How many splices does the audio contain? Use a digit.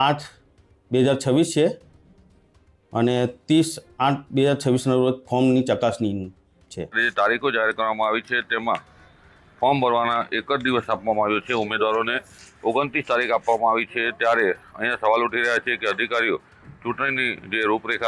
1